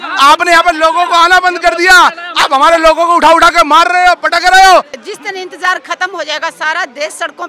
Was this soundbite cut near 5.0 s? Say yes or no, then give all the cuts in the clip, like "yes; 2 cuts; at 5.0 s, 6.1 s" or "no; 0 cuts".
yes; 1 cut; at 5.0 s